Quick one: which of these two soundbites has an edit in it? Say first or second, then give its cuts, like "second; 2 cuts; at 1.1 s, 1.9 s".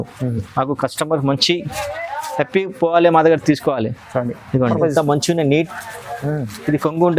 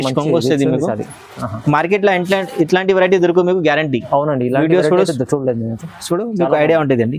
first; 1 cut; at 4.6 s